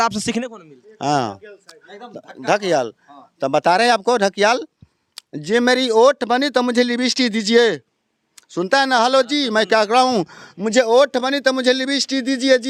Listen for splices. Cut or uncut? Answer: uncut